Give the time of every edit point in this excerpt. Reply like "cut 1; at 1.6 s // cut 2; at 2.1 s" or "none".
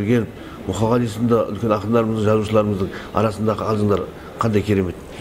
none